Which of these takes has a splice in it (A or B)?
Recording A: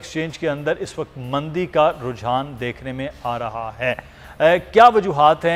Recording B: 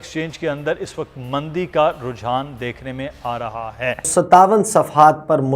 B